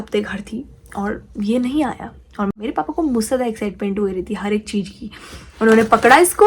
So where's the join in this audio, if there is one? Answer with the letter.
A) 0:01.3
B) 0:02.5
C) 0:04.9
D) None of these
B